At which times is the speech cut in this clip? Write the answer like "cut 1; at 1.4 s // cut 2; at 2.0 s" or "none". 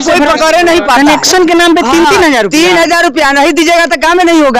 cut 1; at 1.0 s

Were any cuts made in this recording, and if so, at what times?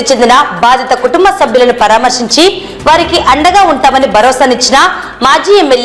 none

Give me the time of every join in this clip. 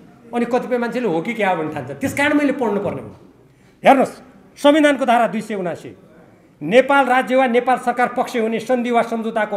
none

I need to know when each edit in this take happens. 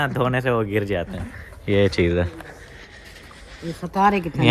none

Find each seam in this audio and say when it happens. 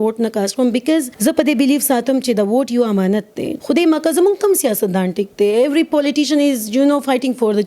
cut 1; at 1.1 s // cut 2; at 3.5 s

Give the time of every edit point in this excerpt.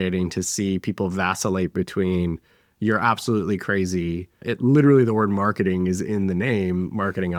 none

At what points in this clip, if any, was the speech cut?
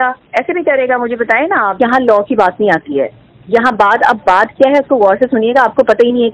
cut 1; at 1.7 s

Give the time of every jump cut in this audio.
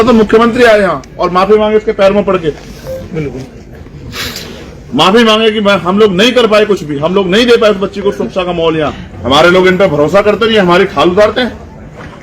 cut 1; at 9.1 s

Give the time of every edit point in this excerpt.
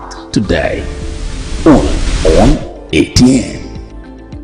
cut 1; at 2.0 s

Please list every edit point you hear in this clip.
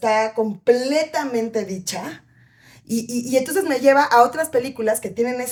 none

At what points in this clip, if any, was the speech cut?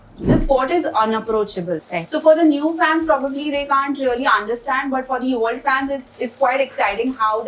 cut 1; at 1.8 s

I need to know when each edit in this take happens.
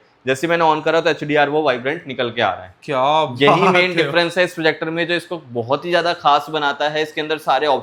none

